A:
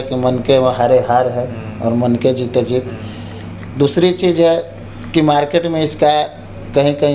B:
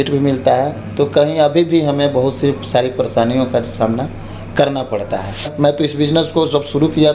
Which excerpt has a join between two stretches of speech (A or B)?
B